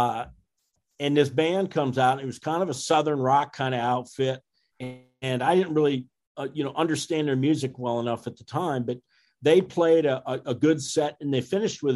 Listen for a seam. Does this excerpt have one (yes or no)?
no